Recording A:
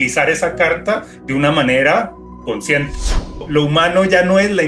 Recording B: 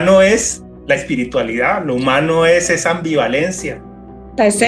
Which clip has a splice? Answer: A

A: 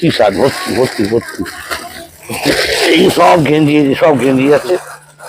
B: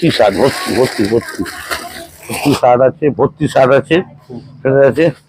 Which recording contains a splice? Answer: A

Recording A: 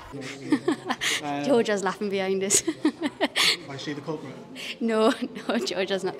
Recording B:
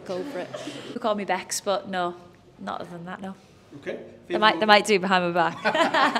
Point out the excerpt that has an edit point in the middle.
B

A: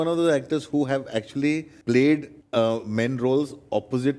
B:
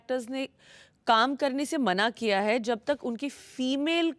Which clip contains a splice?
A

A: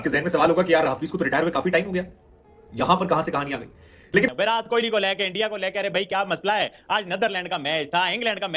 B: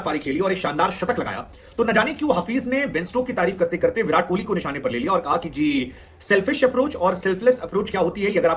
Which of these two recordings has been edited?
A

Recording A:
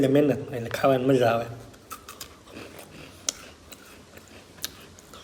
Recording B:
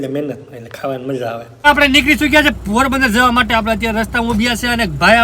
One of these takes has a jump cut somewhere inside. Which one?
B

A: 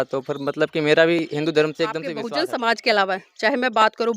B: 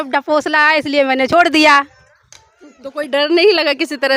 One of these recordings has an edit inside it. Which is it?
A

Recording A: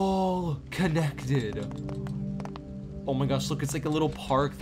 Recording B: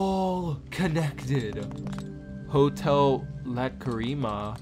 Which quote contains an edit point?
B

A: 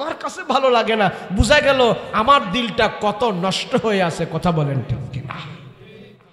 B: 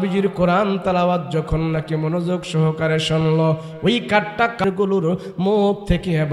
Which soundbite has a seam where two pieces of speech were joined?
B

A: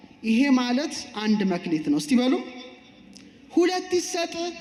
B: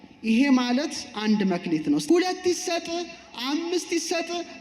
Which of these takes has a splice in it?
B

